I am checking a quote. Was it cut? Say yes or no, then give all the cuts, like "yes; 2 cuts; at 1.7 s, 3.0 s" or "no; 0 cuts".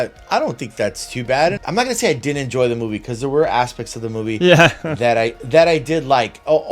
yes; 1 cut; at 1.6 s